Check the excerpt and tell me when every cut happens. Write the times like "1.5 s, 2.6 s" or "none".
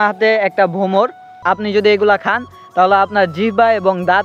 1.3 s